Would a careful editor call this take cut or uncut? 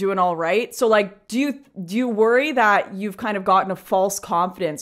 cut